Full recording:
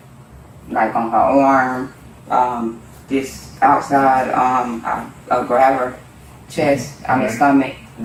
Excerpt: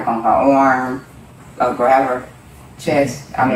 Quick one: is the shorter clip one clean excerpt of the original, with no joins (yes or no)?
no